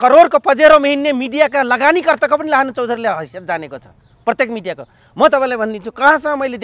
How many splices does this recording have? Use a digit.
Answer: 0